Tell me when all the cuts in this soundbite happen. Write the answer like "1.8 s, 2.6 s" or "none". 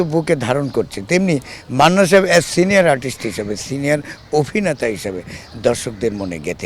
none